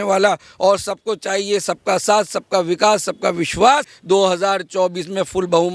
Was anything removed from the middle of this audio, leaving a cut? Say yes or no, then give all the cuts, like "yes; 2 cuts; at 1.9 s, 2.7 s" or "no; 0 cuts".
yes; 1 cut; at 3.9 s